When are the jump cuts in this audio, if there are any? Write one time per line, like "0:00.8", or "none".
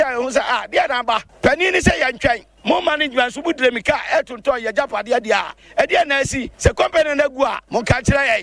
0:01.3
0:02.5
0:05.6
0:06.4
0:07.6